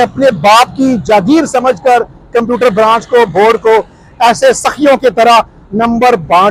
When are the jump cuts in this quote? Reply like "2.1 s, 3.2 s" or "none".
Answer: none